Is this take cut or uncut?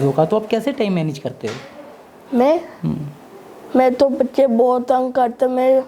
uncut